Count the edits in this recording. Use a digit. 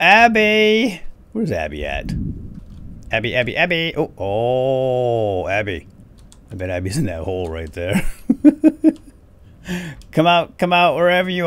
1